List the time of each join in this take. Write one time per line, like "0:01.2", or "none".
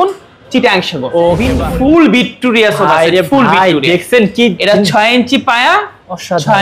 0:01.3